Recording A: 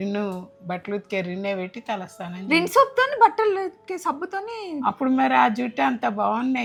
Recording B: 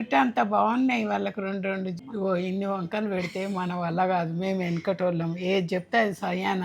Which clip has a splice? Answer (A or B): B